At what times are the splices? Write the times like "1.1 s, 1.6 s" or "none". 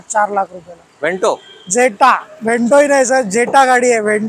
none